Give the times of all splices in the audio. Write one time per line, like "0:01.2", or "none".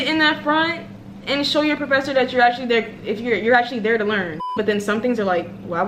0:04.5

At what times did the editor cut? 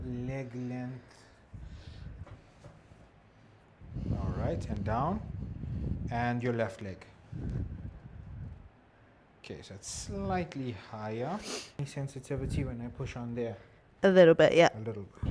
0:02.2
0:11.7

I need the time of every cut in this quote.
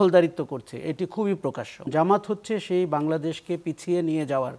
0:01.9

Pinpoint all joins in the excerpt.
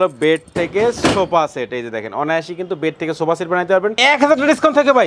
0:04.0

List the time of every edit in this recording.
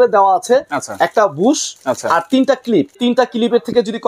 0:03.0

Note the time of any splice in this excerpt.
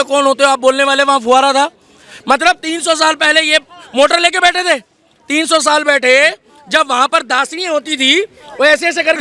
none

